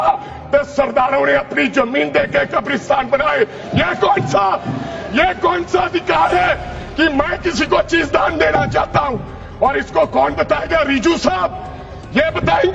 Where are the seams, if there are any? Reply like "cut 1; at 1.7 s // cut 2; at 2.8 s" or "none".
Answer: none